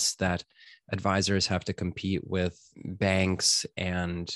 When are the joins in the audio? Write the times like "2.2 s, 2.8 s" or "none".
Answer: 2.7 s